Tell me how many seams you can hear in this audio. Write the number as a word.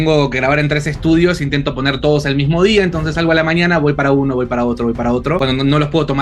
zero